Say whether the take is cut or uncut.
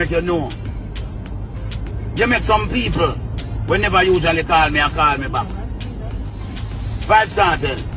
uncut